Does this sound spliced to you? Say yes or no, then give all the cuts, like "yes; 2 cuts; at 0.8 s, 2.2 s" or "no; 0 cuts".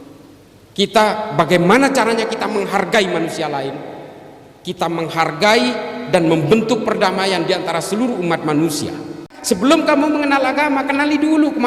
yes; 1 cut; at 9.3 s